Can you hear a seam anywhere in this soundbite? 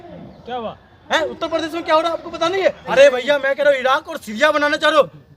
yes; 1 cut; at 2.8 s

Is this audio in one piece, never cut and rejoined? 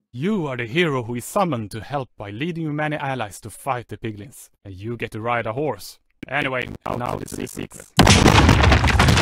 no; 1 cut; at 7.8 s

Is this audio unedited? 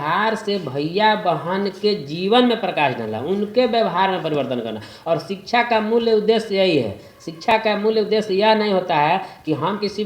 yes; 0 cuts

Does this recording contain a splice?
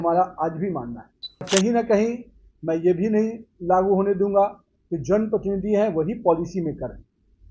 yes; 1 cut; at 1.5 s

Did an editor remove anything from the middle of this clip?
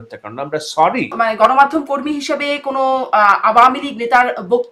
yes; 1 cut; at 1.1 s

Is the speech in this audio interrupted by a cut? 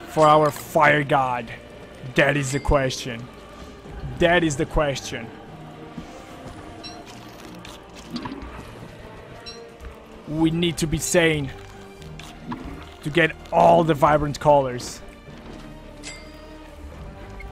yes; 1 cut; at 1.0 s

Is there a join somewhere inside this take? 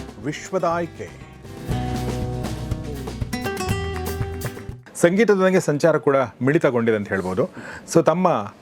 yes; 1 cut; at 4.8 s

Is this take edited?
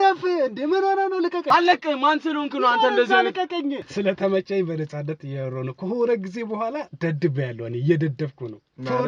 yes; 2 cuts; at 1.4 s, 3.9 s

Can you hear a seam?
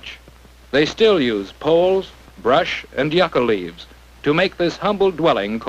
no; 0 cuts

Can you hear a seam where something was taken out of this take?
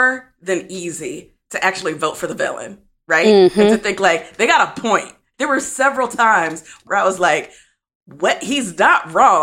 yes; 2 cuts; at 5.3 s, 6.8 s

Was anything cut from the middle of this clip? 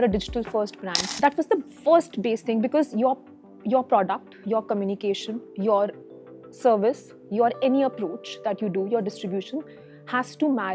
yes; 1 cut; at 1.1 s

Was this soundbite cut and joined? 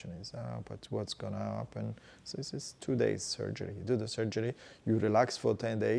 no; 0 cuts

